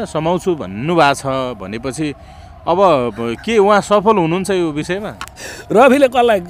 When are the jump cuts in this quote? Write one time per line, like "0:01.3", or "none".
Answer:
none